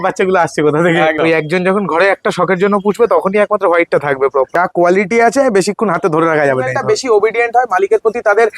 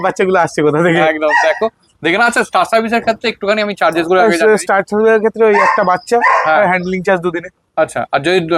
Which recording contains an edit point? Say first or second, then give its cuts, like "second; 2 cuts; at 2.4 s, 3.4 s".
first; 3 cuts; at 1.2 s, 4.6 s, 6.7 s